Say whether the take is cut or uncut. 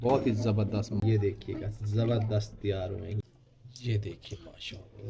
cut